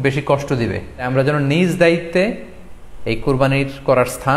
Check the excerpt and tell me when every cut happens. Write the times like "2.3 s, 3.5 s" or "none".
1.1 s